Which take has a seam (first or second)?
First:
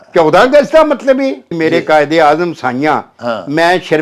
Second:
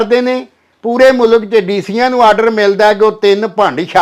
first